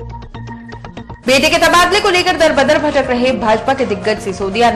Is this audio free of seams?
no; 1 cut; at 1.0 s

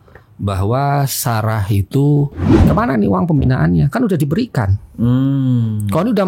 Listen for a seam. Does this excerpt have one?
yes; 1 cut; at 2.5 s

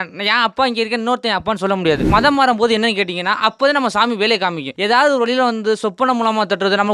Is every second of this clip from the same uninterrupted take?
no; 2 cuts; at 2.0 s, 4.7 s

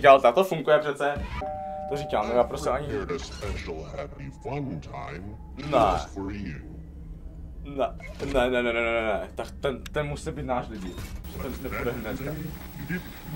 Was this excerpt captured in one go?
no; 1 cut; at 1.3 s

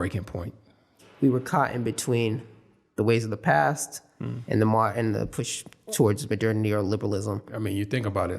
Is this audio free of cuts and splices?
no; 2 cuts; at 1.0 s, 7.5 s

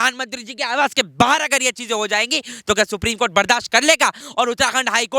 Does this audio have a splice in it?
yes; 1 cut; at 4.2 s

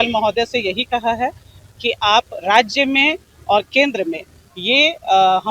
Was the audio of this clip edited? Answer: no; 0 cuts

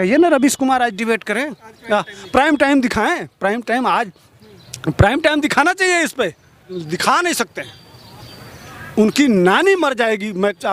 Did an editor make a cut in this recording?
no; 0 cuts

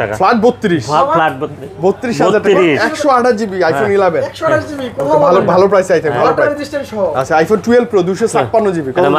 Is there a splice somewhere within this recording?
no; 0 cuts

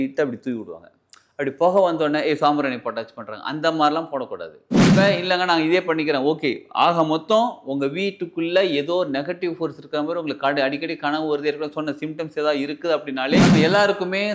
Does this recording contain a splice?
yes; 2 cuts; at 4.9 s, 13.5 s

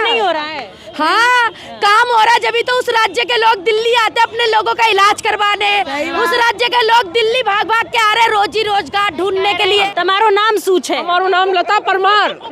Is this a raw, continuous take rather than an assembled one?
no; 1 cut; at 9.9 s

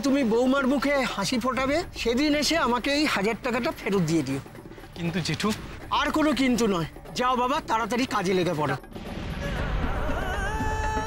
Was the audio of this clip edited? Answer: no; 0 cuts

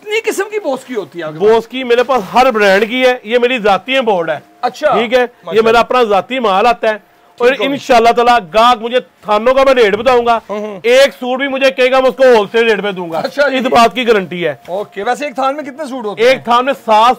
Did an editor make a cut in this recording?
no; 0 cuts

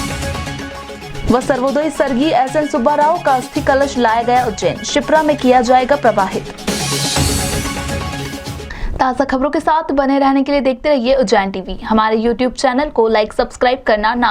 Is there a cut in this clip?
no; 0 cuts

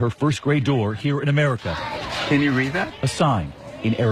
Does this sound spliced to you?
no; 0 cuts

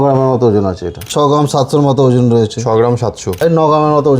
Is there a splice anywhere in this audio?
yes; 2 cuts; at 1.0 s, 3.3 s

